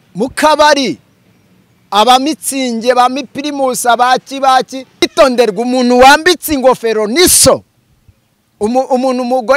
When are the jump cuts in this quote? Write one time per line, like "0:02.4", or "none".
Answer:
0:05.1